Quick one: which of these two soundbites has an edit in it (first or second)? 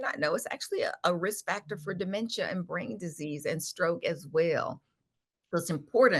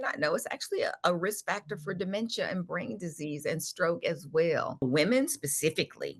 second